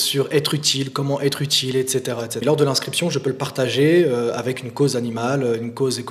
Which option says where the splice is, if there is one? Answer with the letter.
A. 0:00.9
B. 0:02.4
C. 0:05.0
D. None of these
B